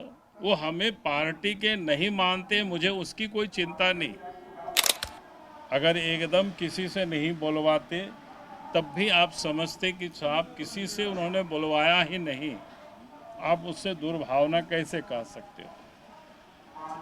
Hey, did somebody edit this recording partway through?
yes; 1 cut; at 4.9 s

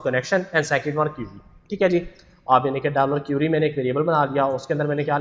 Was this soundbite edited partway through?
no; 0 cuts

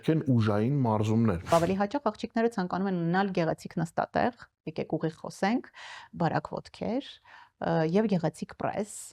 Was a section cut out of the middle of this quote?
yes; 1 cut; at 1.5 s

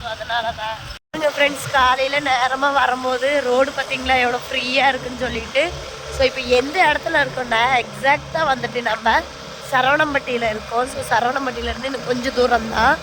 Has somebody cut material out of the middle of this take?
yes; 1 cut; at 1.0 s

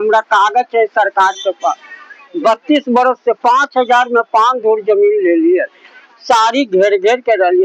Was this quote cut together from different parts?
no; 0 cuts

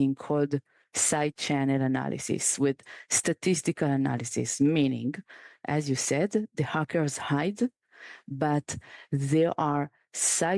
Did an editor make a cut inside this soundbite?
no; 0 cuts

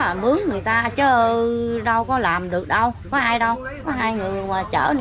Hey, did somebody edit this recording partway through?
no; 0 cuts

